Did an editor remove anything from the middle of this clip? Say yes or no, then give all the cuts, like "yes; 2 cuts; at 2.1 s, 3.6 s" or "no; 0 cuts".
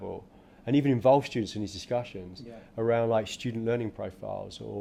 no; 0 cuts